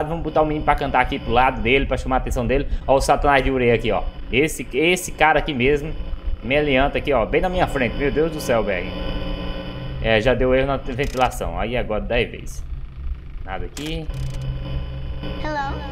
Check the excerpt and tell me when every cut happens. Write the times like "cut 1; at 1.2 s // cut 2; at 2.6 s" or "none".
none